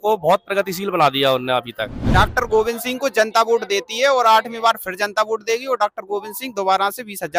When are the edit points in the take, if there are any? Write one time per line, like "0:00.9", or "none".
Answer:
0:02.0